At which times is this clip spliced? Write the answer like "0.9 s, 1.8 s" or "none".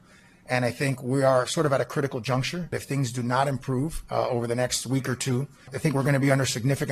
2.7 s, 4.0 s, 5.7 s